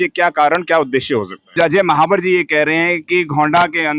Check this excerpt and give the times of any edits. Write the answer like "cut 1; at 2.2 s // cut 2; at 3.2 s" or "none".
cut 1; at 1.5 s